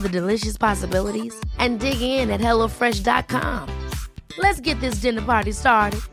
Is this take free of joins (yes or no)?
yes